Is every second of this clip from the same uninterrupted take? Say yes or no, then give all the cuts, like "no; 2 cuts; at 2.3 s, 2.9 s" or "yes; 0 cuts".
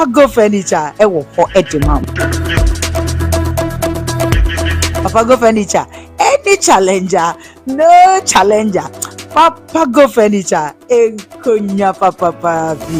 no; 1 cut; at 0.9 s